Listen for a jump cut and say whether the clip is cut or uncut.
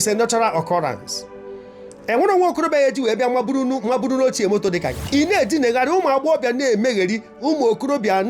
cut